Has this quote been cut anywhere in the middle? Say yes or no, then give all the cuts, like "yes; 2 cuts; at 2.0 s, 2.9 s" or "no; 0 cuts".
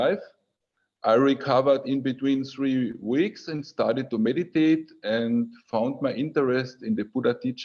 no; 0 cuts